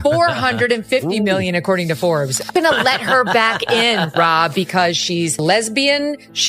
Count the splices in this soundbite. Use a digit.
2